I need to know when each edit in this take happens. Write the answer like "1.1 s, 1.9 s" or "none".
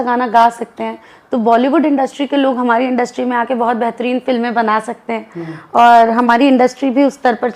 none

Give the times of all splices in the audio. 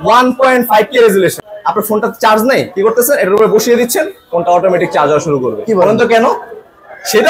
1.4 s

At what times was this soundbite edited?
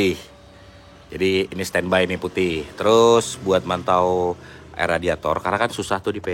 none

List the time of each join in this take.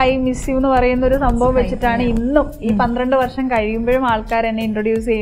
none

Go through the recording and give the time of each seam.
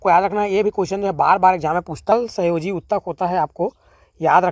2.1 s

